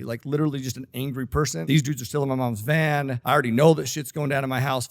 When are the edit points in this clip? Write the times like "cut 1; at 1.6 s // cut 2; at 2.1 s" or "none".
cut 1; at 1.6 s // cut 2; at 3.2 s